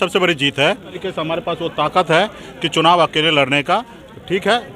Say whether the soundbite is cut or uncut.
cut